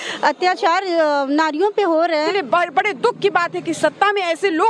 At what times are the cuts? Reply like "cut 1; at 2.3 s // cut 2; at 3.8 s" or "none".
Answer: cut 1; at 2.3 s